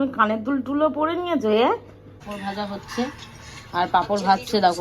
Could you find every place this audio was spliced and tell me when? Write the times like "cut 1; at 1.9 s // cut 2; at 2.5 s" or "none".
cut 1; at 2.4 s